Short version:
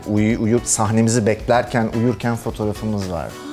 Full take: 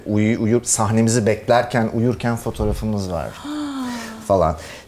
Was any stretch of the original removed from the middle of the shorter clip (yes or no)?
no